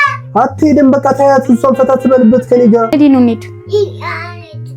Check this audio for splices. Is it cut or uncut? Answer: cut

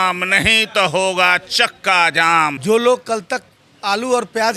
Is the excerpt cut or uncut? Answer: cut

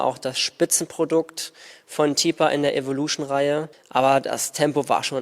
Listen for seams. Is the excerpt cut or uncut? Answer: cut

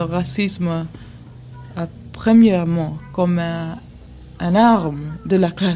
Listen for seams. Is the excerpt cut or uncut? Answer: uncut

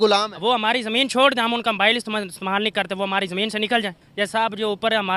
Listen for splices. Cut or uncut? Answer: uncut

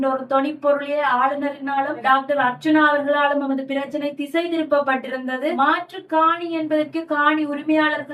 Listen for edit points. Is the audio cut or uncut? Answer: cut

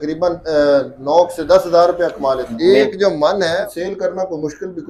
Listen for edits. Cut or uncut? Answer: cut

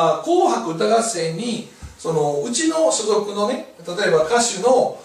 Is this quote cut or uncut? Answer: uncut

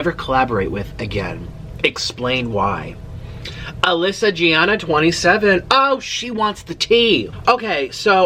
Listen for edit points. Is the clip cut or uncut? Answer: uncut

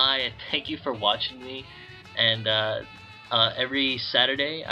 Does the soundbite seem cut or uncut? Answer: uncut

